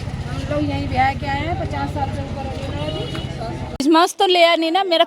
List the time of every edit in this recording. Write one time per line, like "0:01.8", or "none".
0:03.8